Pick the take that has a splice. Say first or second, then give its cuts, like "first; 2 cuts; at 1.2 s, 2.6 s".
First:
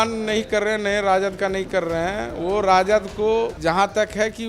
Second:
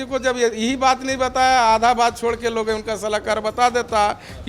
first; 1 cut; at 3.5 s